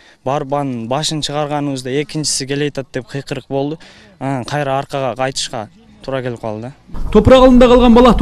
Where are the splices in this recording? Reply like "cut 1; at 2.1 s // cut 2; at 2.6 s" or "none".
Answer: none